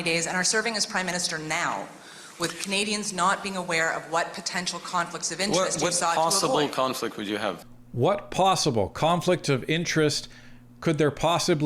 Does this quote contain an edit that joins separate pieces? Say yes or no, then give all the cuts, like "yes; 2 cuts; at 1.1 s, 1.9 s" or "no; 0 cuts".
yes; 1 cut; at 7.8 s